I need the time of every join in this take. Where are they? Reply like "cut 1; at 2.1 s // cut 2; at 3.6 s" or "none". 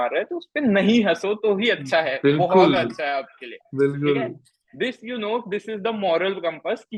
none